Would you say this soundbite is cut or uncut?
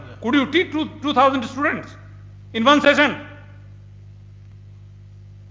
uncut